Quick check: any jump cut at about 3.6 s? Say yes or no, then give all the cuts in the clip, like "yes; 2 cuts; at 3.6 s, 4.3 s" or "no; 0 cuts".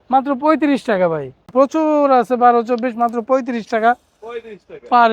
no; 1 cut; at 1.5 s